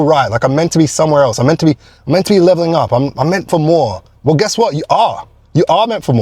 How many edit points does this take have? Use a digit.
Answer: 0